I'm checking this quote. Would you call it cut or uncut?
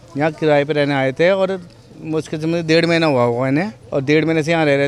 uncut